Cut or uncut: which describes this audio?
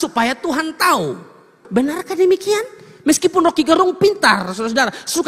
cut